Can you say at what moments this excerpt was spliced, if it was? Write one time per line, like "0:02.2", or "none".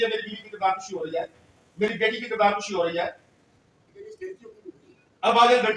none